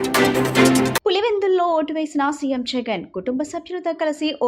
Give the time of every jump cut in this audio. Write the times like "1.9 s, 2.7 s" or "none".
0.9 s